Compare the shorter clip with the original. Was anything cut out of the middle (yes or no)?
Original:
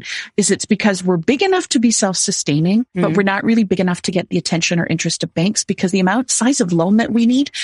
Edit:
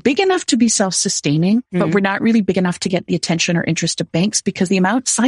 no